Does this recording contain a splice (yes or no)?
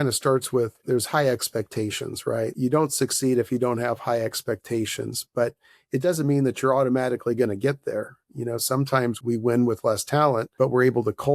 yes